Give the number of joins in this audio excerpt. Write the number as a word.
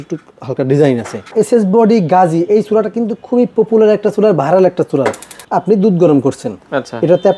two